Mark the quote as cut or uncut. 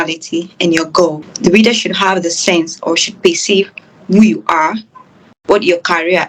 cut